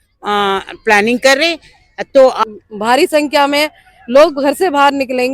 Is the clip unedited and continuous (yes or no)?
no